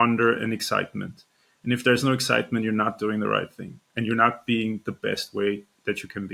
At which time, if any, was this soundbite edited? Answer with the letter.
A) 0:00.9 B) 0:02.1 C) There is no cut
C